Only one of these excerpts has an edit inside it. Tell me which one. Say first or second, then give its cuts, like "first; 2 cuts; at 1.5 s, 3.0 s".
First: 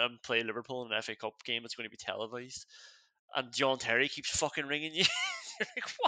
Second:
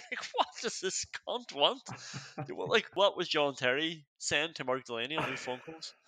second; 1 cut; at 2.9 s